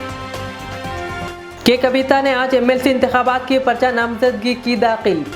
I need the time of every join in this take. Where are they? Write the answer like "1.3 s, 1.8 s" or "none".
1.3 s

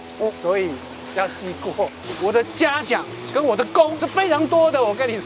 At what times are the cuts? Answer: 2.1 s, 4.0 s

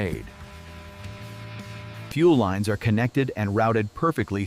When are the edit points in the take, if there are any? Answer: 2.1 s

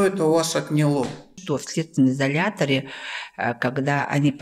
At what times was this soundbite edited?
1.4 s

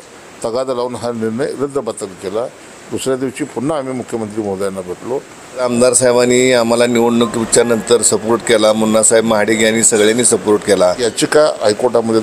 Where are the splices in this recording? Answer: 5.6 s, 11.1 s

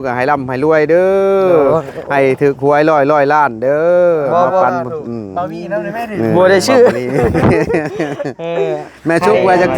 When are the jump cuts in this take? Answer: none

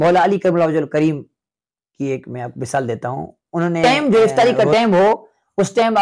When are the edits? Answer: 3.8 s

